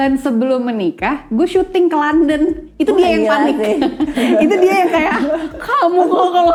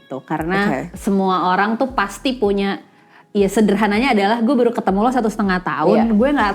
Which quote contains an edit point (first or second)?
second